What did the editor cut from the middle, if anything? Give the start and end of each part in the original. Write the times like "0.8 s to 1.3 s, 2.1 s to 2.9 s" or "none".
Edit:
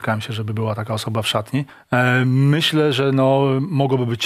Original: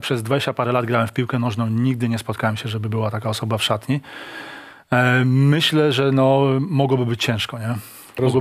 4.1 s to 4.8 s